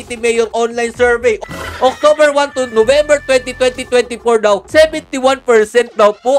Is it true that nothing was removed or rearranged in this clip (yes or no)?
no